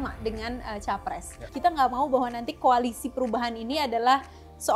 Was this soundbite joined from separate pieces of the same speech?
yes; 1 cut; at 1.4 s

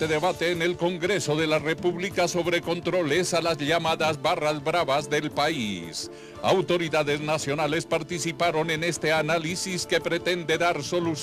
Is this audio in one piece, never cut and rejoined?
no; 1 cut; at 9.5 s

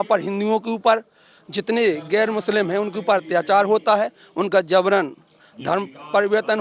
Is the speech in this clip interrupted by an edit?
no; 0 cuts

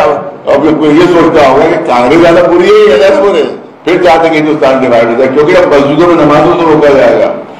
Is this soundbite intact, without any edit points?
no; 1 cut; at 3.7 s

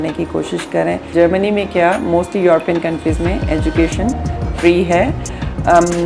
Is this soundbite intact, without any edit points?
no; 1 cut; at 1.1 s

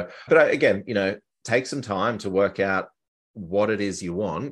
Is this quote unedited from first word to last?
yes; 0 cuts

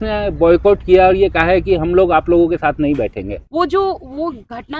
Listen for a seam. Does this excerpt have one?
yes; 1 cut; at 3.4 s

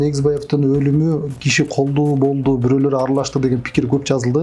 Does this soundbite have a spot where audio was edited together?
no; 0 cuts

